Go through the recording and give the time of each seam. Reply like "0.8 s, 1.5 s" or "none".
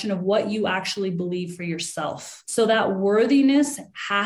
2.3 s